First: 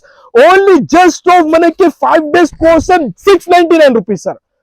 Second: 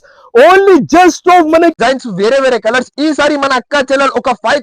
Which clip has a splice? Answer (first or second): second